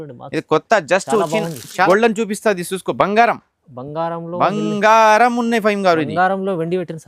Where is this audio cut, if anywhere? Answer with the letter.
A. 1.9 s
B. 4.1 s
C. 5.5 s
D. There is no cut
A